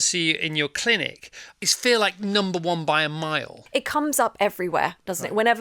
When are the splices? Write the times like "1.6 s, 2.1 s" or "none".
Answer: 1.5 s, 3.6 s